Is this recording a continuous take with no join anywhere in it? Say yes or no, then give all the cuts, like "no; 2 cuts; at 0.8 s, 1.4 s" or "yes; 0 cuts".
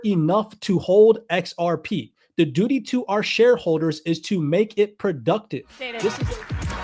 no; 1 cut; at 5.9 s